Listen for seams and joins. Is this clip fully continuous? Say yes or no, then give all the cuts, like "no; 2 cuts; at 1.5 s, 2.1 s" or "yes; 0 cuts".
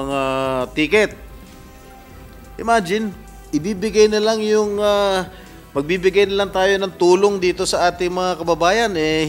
no; 2 cuts; at 1.3 s, 2.5 s